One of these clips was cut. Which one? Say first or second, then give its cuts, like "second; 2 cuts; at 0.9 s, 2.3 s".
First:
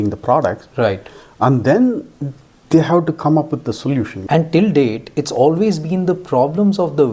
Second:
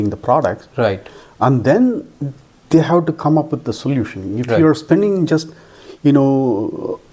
first; 1 cut; at 4.2 s